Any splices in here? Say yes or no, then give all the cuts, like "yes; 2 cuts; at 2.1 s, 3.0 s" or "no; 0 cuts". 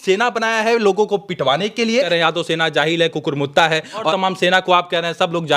yes; 2 cuts; at 2.1 s, 4.1 s